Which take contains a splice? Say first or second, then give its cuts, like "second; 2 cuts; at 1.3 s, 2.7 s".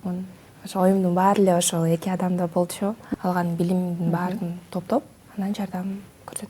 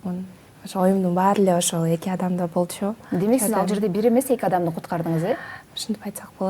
first; 1 cut; at 3.0 s